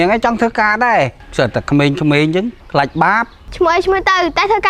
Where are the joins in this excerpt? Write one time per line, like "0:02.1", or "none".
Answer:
0:01.2
0:03.4